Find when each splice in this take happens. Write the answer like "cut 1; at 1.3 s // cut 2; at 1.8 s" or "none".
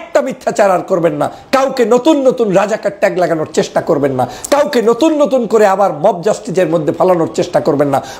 none